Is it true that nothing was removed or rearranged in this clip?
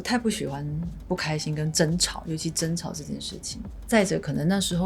yes; 0 cuts

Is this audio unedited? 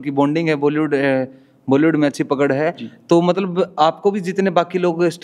yes; 0 cuts

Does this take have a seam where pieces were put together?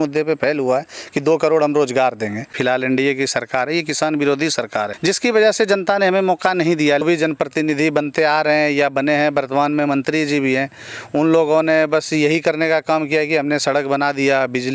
yes; 3 cuts; at 2.5 s, 4.9 s, 7.0 s

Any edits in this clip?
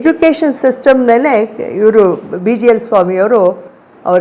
no; 0 cuts

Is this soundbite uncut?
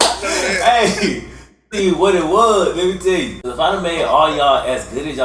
no; 1 cut; at 3.4 s

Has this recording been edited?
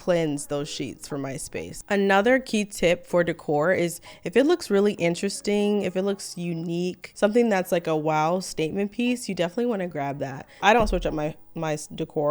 yes; 3 cuts; at 1.7 s, 7.1 s, 10.4 s

